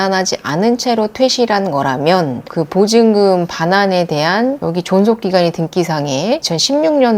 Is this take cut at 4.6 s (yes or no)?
yes